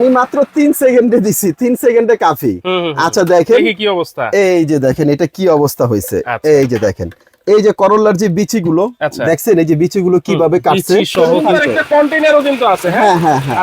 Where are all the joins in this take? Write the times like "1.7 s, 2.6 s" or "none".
11.4 s